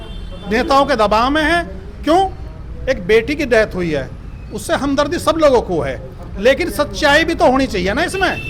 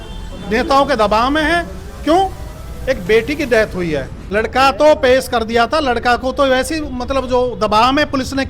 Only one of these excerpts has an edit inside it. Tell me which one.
second; 1 cut; at 4.2 s

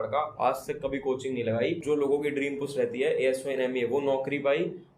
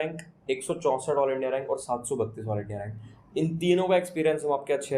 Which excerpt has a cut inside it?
first; 1 cut; at 1.8 s

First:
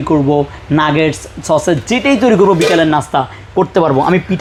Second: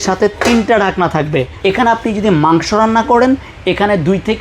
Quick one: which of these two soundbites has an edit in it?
second; 1 cut; at 1.5 s

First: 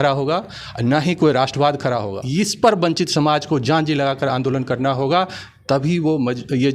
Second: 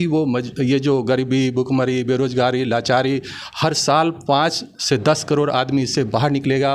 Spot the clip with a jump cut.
first; 1 cut; at 2.2 s

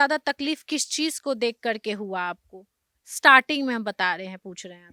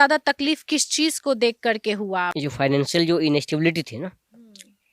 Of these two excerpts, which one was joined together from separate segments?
second; 1 cut; at 2.4 s

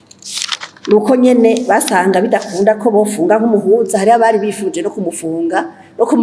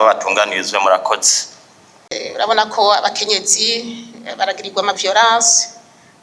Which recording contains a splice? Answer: second; 1 cut; at 2.1 s

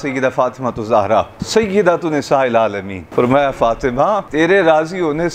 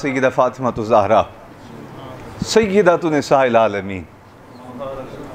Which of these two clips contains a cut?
first; 3 cuts; at 1.4 s, 2.9 s, 4.3 s

